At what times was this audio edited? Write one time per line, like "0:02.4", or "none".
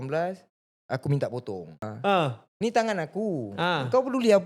0:01.9